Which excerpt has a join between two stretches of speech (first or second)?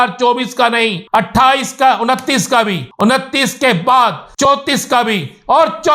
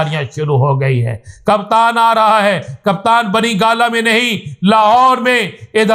first